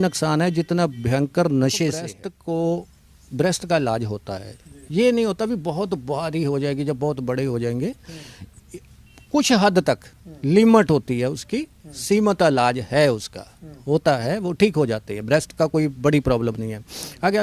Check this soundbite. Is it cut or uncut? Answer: cut